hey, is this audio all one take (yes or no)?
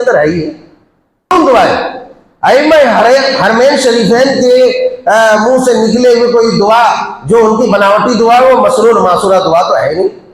no